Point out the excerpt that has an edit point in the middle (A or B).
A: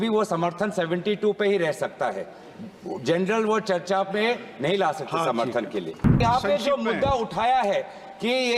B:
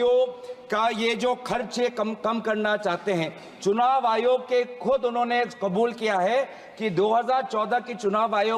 A